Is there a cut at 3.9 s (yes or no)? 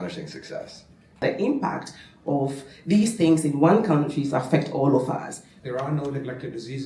no